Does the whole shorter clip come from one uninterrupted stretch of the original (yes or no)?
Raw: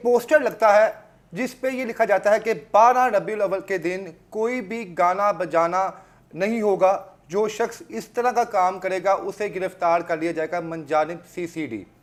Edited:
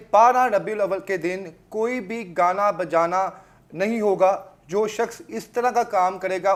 yes